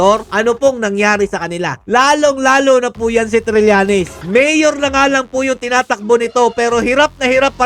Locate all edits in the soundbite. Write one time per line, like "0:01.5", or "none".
0:04.2